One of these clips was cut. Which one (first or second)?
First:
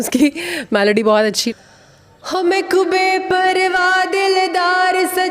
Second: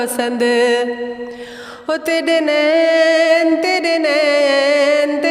first